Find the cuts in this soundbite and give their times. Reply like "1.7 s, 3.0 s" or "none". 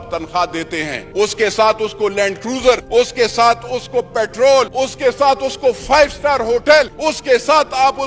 1.0 s, 2.8 s, 4.7 s, 6.9 s